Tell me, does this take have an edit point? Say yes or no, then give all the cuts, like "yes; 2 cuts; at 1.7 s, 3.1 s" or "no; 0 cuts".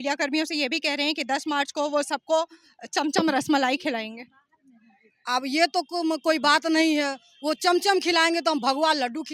no; 0 cuts